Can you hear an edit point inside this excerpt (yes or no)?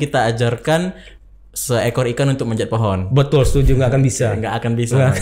no